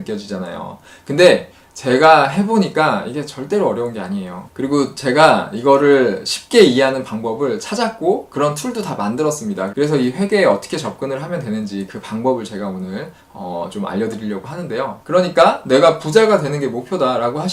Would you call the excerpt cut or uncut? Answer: cut